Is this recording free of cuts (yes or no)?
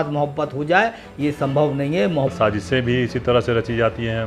no